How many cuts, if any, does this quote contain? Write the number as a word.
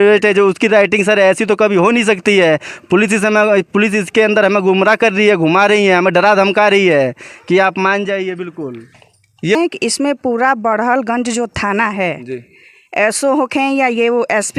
one